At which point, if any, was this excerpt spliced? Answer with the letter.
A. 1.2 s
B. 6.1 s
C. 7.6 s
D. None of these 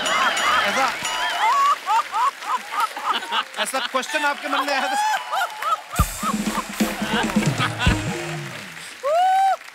D